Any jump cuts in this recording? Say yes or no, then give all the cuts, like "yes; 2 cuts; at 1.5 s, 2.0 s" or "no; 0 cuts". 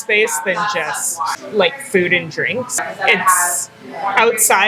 yes; 2 cuts; at 1.4 s, 2.9 s